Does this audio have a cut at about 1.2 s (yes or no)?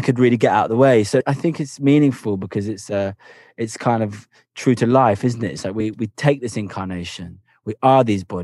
yes